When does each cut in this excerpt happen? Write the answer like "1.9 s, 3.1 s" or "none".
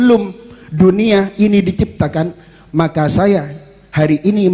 none